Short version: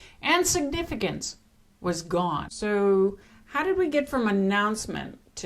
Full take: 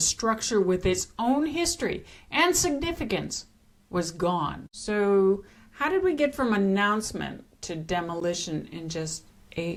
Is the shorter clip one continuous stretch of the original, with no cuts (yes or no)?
no